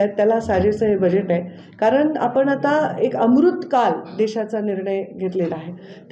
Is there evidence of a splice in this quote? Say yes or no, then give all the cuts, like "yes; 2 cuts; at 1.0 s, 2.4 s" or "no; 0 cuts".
no; 0 cuts